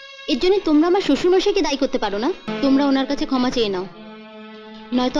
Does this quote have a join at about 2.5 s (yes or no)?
yes